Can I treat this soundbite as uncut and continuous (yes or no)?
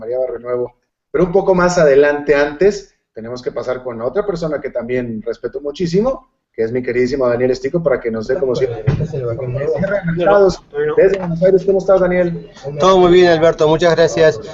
yes